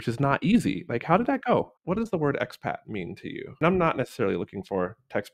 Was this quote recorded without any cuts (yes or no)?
no